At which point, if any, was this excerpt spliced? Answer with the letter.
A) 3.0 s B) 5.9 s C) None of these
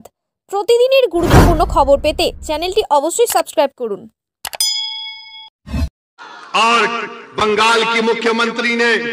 B